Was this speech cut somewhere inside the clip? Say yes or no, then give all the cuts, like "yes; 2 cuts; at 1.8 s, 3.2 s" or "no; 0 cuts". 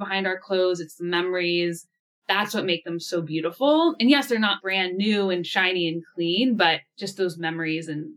no; 0 cuts